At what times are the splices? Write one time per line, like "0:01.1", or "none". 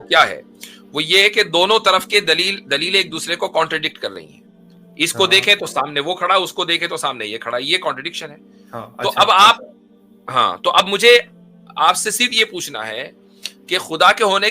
none